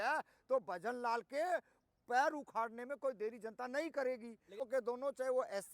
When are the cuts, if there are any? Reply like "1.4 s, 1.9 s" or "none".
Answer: 4.6 s